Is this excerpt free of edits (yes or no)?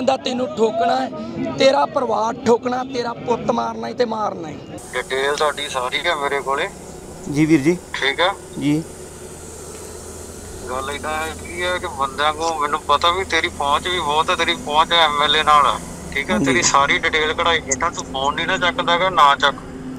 no